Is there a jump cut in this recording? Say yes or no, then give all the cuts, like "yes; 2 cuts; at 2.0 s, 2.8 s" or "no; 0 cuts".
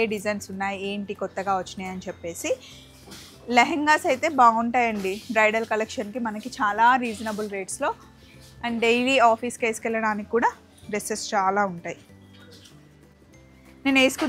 no; 0 cuts